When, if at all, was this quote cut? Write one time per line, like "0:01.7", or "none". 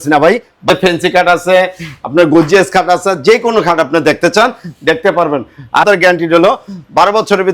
0:00.7
0:05.9